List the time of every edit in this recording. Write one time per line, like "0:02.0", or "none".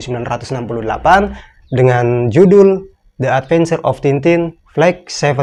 none